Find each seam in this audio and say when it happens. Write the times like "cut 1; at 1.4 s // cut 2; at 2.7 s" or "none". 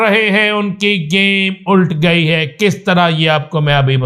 none